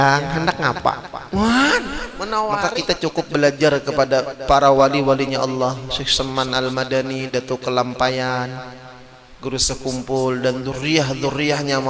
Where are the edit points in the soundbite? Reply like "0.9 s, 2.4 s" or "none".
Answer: 2.5 s